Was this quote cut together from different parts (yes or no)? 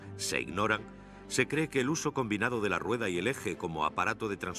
no